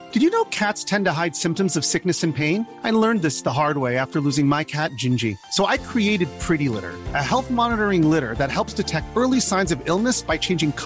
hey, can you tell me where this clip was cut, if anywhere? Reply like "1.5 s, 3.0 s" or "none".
none

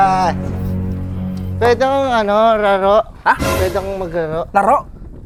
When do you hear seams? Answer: none

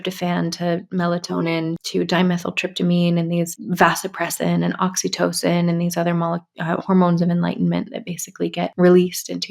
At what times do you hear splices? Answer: 1.8 s, 3.6 s, 8.7 s

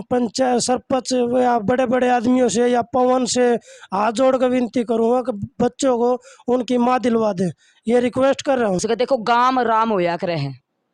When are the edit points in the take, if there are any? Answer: 8.8 s

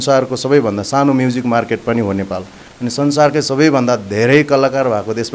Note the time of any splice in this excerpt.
none

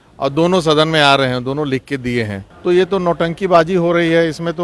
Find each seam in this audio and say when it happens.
2.4 s

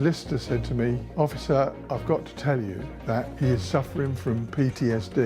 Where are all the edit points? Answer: 1.1 s, 1.8 s, 3.3 s

